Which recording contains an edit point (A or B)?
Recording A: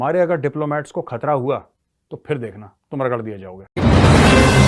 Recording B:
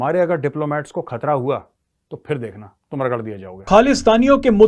A